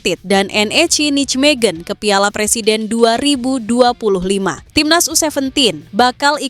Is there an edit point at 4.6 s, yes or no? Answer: yes